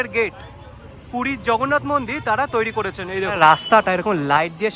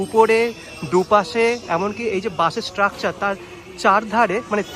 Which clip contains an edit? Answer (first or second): first